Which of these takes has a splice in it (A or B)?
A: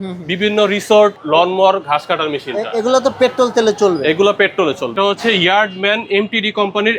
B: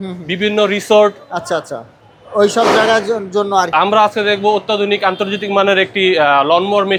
A